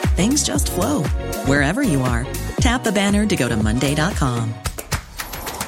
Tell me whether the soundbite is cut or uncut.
uncut